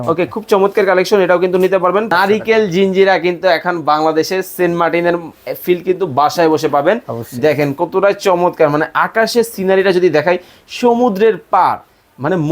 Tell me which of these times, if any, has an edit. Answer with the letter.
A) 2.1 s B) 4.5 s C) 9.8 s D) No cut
A